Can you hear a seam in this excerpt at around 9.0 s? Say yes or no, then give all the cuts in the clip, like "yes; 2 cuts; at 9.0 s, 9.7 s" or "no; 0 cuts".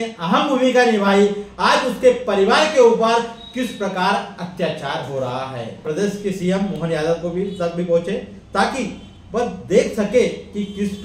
no; 1 cut; at 5.7 s